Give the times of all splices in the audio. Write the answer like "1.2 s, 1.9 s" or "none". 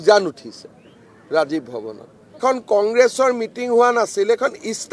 2.4 s